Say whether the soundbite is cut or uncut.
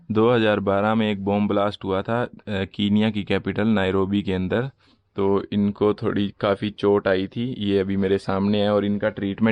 uncut